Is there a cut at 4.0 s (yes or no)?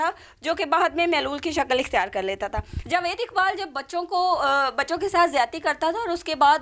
no